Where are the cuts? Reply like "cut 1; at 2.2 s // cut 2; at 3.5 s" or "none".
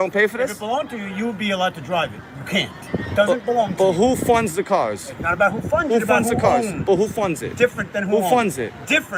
none

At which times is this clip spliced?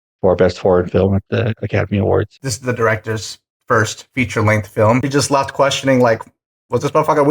cut 1; at 2.4 s // cut 2; at 5.1 s

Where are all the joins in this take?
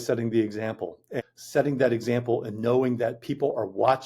cut 1; at 1.2 s

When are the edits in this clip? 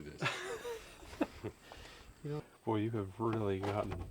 cut 1; at 2.5 s

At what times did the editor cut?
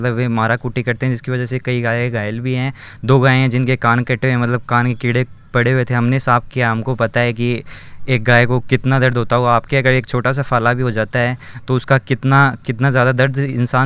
none

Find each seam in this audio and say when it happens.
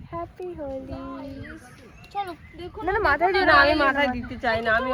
none

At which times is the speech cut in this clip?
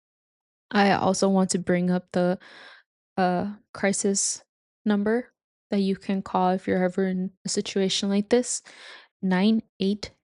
cut 1; at 9.1 s

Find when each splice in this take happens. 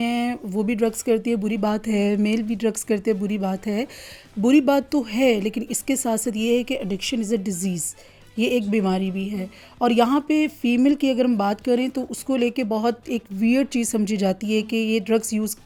none

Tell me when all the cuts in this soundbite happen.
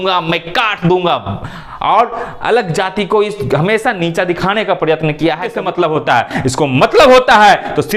cut 1; at 5.6 s

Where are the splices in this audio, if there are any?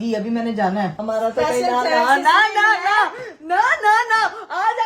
cut 1; at 1.0 s

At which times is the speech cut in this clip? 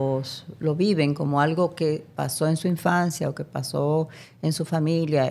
none

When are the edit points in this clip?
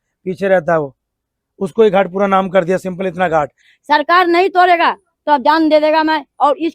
cut 1; at 3.6 s

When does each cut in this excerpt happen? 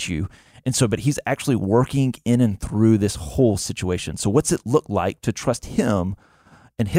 none

